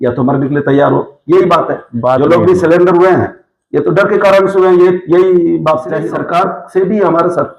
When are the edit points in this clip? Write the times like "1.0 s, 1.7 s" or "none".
6.1 s